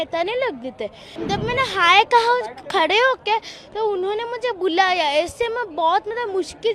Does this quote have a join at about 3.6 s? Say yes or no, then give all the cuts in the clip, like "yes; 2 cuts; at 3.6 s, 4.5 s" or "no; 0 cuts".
no; 1 cut; at 1.0 s